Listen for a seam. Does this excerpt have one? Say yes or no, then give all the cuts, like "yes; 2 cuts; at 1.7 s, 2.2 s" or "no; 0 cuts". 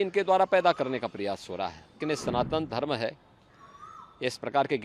yes; 1 cut; at 1.9 s